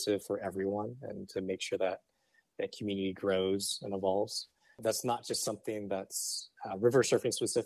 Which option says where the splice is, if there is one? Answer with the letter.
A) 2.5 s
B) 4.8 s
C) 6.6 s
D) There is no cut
B